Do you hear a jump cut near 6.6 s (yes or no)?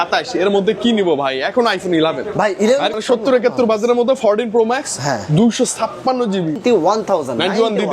yes